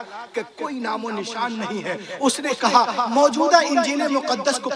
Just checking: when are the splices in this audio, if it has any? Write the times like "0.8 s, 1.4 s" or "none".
none